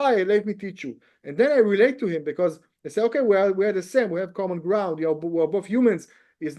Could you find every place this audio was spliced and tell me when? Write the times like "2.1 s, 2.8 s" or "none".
none